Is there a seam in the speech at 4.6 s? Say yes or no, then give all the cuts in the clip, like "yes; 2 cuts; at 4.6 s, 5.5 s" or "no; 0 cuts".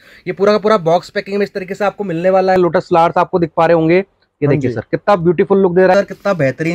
no; 2 cuts; at 2.6 s, 5.9 s